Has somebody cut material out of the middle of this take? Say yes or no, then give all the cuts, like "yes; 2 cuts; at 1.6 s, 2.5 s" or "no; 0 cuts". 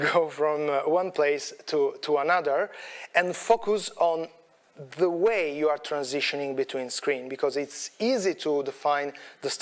no; 0 cuts